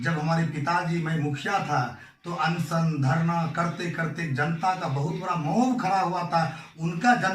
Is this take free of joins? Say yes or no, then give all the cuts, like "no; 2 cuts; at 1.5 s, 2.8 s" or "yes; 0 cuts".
yes; 0 cuts